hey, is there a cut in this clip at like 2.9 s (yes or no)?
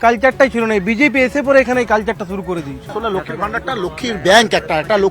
yes